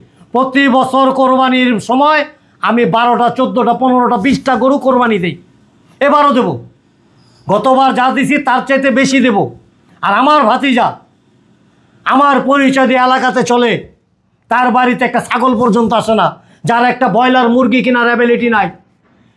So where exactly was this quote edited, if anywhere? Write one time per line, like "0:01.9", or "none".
none